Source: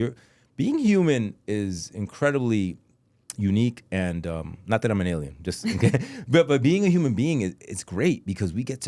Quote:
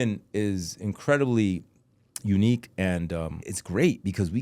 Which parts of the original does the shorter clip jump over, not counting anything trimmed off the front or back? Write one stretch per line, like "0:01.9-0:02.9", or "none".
0:04.5-0:07.6